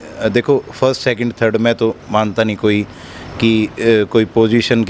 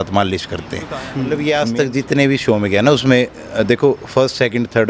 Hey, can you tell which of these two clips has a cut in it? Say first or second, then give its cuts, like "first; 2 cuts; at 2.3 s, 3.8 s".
second; 1 cut; at 1.2 s